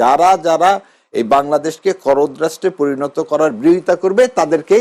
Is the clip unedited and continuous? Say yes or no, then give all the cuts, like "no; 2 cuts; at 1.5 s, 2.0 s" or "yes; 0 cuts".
yes; 0 cuts